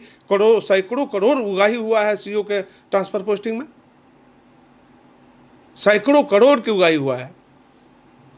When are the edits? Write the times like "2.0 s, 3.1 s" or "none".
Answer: none